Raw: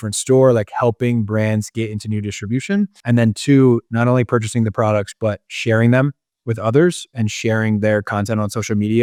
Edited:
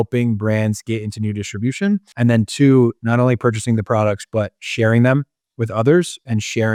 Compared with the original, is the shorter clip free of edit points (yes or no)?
yes